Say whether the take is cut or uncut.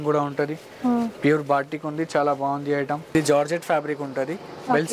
cut